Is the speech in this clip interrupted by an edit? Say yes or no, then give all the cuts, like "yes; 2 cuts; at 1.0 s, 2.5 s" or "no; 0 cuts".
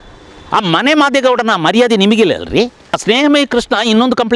yes; 1 cut; at 3.0 s